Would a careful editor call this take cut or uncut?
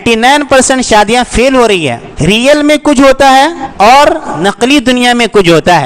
cut